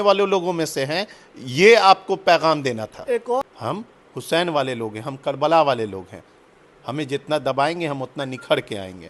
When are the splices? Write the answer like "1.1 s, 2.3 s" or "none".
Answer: 3.4 s